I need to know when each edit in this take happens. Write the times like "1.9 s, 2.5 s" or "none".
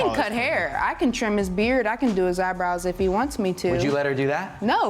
3.3 s